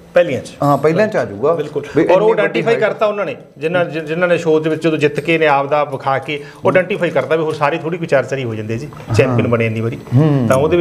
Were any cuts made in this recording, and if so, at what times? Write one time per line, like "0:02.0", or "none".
none